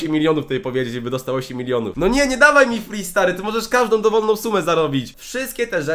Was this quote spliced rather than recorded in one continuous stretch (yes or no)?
yes